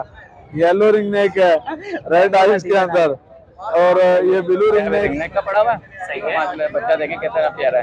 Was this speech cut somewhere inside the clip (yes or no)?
yes